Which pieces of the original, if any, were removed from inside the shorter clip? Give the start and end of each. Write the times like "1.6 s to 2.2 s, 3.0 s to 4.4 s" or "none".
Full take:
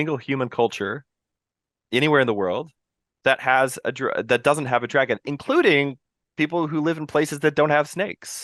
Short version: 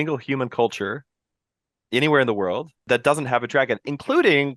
2.8 s to 4.2 s

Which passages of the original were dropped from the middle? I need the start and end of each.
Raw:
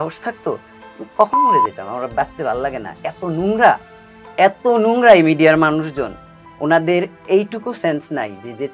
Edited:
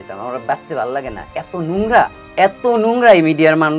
3.9 s to 4.2 s

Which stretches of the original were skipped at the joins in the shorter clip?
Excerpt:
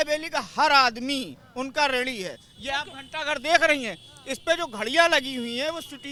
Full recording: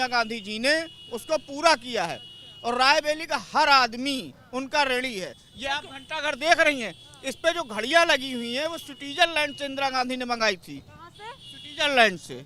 none

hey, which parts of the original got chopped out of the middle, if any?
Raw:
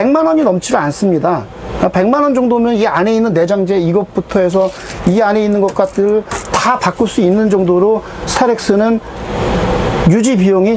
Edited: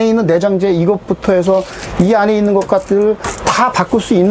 none

